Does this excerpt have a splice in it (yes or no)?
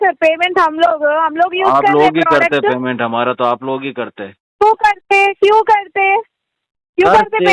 no